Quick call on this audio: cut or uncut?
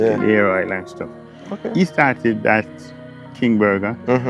uncut